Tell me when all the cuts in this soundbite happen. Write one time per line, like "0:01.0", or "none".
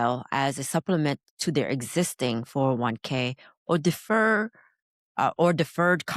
none